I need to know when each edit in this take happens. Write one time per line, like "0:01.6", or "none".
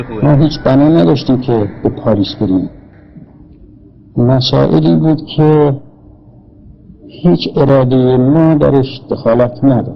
none